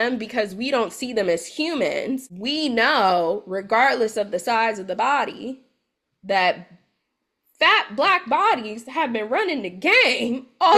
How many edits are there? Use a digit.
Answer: 1